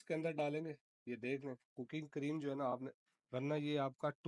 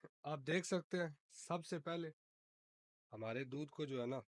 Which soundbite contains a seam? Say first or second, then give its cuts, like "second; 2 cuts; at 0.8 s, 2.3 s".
first; 1 cut; at 3.0 s